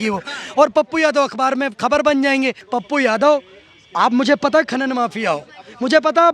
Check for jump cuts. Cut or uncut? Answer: cut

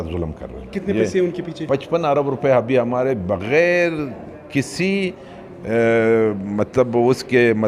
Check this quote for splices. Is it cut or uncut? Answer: uncut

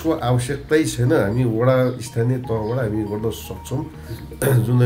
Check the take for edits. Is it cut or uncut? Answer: uncut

